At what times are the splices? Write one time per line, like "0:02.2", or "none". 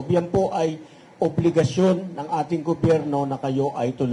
none